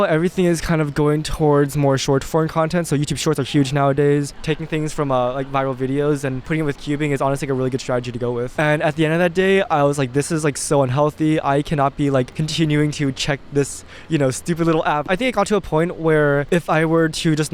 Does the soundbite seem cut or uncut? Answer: cut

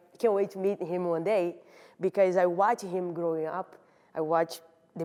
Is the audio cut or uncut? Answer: uncut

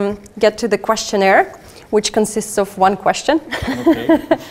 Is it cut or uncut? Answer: uncut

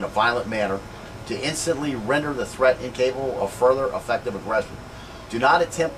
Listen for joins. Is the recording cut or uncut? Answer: uncut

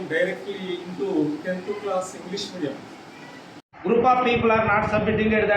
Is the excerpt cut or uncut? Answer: cut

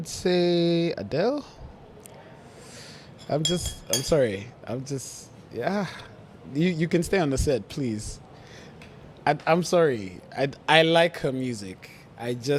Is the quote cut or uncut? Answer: uncut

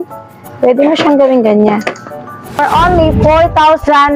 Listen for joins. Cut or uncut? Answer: cut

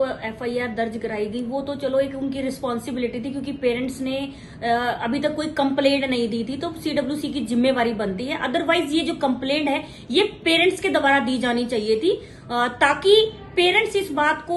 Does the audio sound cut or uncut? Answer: uncut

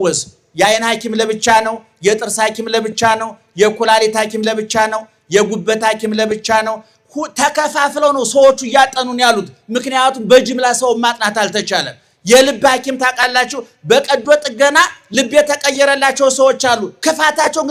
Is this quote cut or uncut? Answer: uncut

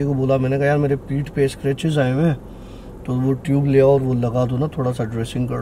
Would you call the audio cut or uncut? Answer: uncut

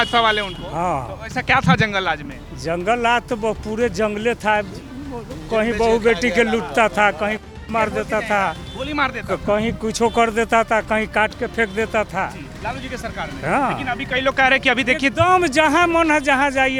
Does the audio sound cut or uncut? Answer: uncut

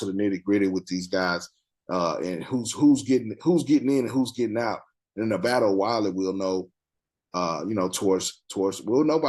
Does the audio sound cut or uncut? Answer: uncut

